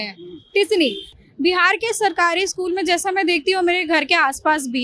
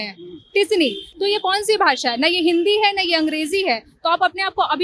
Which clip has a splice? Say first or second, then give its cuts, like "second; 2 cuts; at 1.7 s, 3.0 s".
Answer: first; 1 cut; at 1.1 s